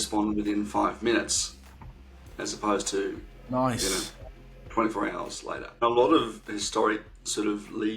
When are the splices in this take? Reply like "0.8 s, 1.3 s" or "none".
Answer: 5.8 s